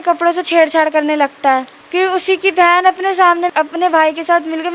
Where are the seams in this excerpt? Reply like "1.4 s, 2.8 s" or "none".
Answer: 1.8 s, 3.5 s